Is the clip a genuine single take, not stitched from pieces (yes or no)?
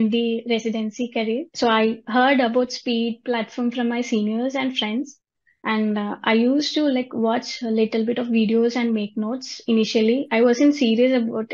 no